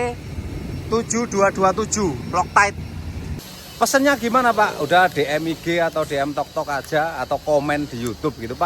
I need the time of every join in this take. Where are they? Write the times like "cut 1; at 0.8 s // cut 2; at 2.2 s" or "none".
cut 1; at 3.3 s